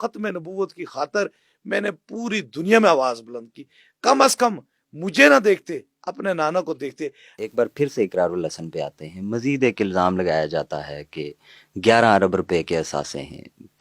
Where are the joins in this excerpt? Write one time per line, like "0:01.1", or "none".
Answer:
0:07.3